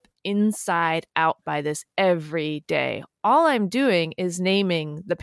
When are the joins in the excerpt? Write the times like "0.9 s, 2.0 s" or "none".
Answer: none